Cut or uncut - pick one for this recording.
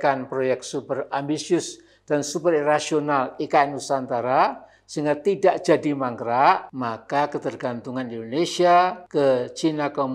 cut